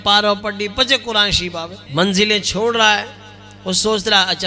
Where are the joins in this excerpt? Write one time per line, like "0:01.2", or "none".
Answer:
0:01.7